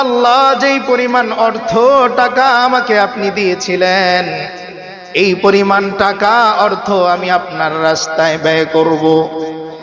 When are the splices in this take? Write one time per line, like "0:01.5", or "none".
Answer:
none